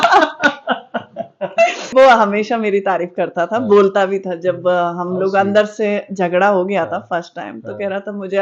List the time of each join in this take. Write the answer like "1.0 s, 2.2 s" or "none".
1.9 s